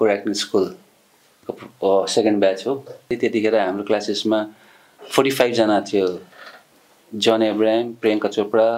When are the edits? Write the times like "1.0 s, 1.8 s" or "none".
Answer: 3.1 s